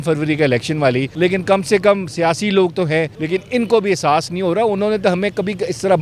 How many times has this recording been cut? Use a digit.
2